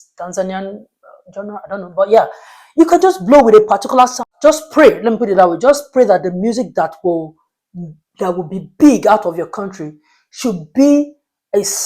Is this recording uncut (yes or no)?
no